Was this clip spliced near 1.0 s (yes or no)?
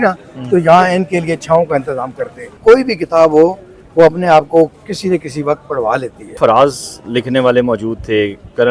no